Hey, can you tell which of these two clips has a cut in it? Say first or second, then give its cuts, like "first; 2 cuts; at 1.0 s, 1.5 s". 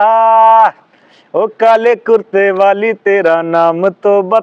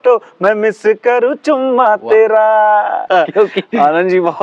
second; 1 cut; at 3.1 s